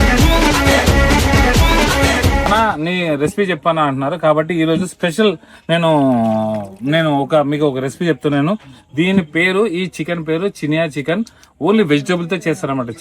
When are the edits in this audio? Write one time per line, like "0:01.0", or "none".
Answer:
0:02.5